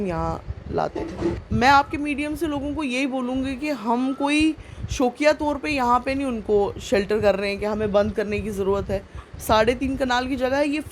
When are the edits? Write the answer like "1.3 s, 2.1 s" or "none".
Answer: 1.4 s